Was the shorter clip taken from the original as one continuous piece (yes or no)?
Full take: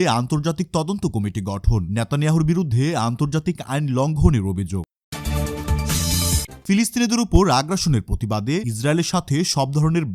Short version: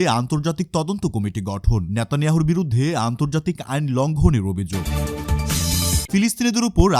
no